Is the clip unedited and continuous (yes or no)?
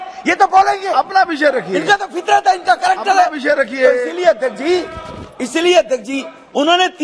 yes